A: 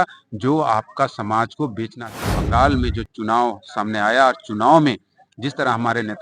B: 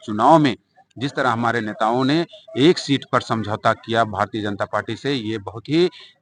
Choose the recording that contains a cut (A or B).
A